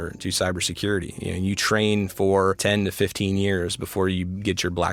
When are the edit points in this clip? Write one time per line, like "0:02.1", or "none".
none